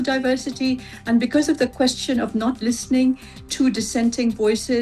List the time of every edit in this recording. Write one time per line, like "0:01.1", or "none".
0:02.6